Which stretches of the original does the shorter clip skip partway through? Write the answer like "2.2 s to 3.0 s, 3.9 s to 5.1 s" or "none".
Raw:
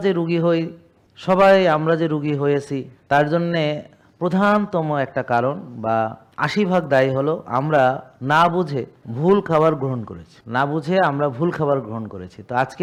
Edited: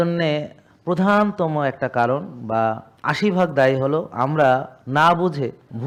none